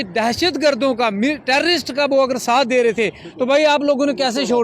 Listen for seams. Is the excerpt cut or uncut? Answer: uncut